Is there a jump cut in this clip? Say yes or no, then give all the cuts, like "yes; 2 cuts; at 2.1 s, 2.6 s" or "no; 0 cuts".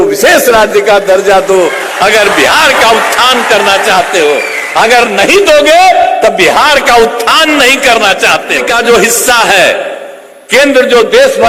yes; 1 cut; at 8.6 s